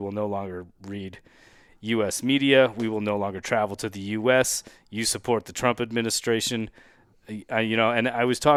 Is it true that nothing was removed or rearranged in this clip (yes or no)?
yes